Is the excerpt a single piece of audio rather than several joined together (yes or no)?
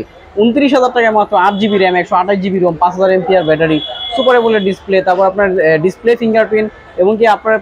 yes